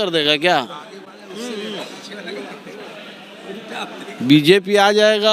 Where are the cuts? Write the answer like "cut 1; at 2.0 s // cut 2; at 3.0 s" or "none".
none